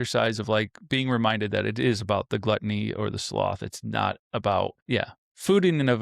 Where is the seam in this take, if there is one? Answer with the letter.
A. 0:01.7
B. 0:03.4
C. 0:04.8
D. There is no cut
C